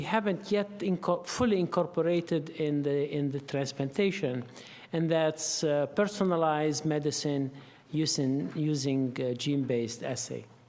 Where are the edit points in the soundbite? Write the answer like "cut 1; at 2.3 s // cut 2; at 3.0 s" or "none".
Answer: cut 1; at 9.0 s